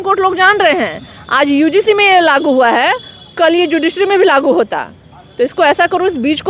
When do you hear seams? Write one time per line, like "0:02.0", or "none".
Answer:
none